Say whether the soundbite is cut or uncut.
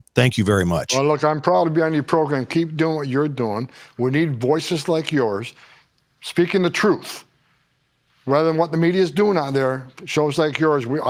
uncut